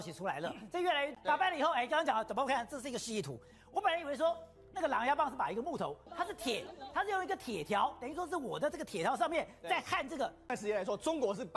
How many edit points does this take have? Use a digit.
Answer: 3